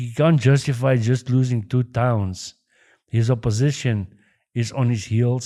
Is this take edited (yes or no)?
no